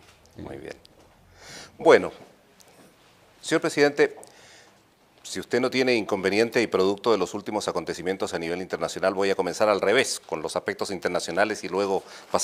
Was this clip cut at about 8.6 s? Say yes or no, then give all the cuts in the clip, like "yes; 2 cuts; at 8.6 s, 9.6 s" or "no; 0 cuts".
yes; 1 cut; at 8.6 s